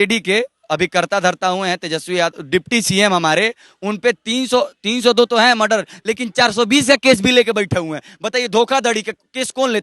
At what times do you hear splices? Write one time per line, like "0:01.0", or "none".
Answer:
none